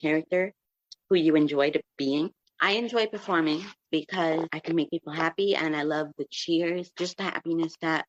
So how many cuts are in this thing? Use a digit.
0